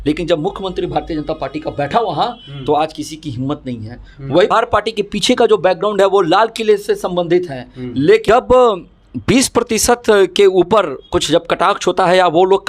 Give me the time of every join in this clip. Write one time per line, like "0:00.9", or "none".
0:04.5
0:08.3